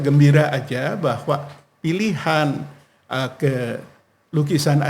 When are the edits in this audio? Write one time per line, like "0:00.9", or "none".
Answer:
none